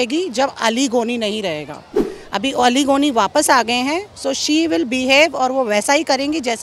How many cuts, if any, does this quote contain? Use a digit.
0